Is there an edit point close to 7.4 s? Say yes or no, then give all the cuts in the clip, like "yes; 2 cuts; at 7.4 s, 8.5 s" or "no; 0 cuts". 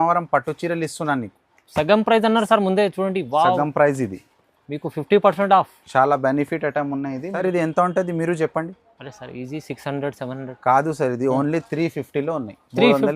yes; 1 cut; at 7.4 s